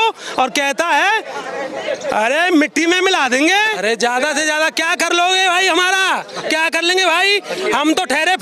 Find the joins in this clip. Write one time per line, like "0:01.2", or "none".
0:03.7